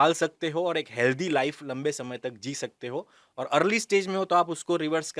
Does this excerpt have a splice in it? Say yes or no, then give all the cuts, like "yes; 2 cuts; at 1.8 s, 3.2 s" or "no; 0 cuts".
no; 0 cuts